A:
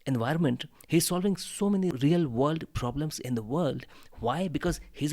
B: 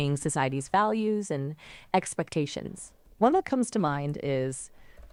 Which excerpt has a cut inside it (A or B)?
A